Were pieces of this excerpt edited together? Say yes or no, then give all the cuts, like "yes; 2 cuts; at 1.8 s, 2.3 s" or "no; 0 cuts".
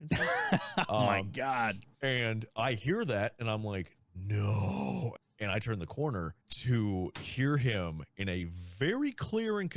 yes; 3 cuts; at 1.9 s, 5.1 s, 6.5 s